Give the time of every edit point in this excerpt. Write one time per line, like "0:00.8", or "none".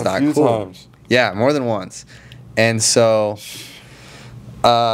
none